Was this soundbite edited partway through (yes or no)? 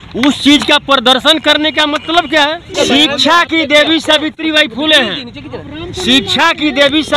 yes